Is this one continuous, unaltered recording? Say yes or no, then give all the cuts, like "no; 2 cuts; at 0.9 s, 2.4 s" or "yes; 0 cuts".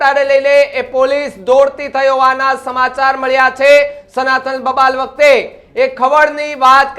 yes; 0 cuts